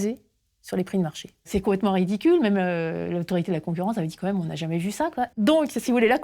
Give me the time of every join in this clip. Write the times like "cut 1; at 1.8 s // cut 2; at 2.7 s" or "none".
cut 1; at 1.5 s // cut 2; at 5.3 s